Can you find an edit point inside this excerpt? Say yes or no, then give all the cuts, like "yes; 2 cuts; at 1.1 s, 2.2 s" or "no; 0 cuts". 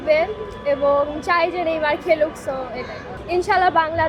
yes; 1 cut; at 3.1 s